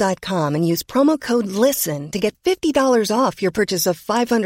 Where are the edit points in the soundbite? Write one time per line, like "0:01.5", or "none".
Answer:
none